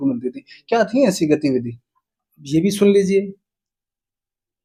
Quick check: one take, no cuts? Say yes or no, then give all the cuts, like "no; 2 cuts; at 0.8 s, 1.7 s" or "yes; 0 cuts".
yes; 0 cuts